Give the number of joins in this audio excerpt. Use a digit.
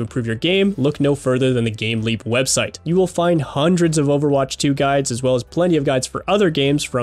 1